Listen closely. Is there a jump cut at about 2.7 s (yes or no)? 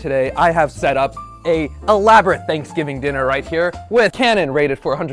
no